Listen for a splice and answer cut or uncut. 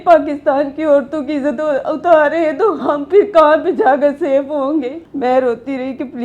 cut